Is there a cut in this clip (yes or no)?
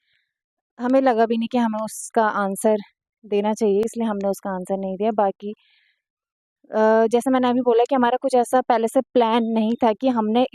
no